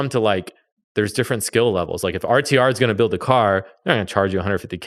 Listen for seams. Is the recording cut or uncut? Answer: uncut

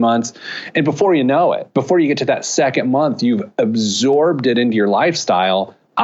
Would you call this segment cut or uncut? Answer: uncut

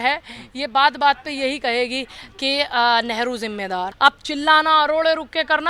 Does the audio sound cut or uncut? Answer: cut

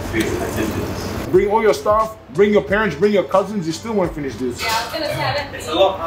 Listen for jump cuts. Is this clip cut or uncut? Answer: cut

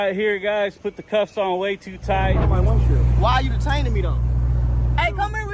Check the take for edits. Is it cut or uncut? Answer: cut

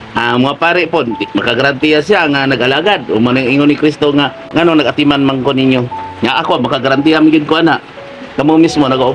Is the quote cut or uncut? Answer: cut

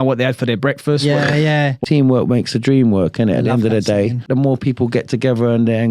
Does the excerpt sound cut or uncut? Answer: cut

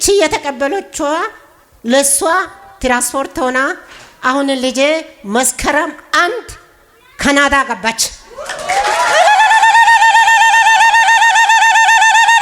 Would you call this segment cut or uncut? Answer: uncut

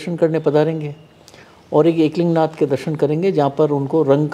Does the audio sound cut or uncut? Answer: uncut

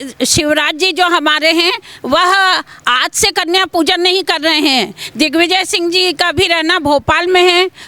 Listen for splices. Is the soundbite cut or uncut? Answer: uncut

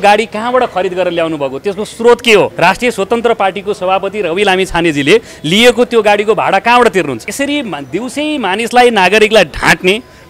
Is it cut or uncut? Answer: cut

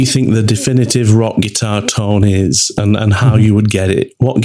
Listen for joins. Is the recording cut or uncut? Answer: uncut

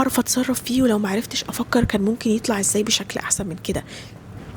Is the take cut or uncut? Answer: uncut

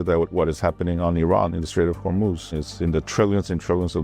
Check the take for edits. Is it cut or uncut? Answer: cut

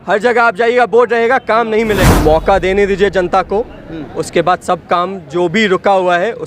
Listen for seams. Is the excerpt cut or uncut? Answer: cut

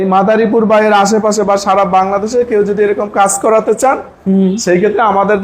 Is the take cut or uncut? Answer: uncut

